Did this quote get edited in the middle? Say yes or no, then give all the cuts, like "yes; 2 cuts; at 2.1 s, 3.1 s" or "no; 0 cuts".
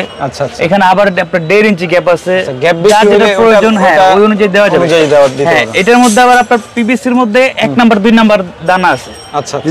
no; 0 cuts